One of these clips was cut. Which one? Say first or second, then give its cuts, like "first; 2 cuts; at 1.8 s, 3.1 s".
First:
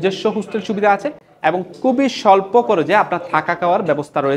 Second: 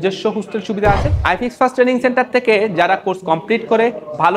second; 1 cut; at 1.1 s